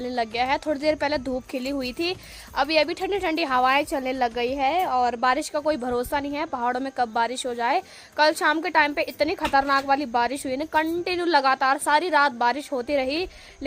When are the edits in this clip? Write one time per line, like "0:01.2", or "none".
none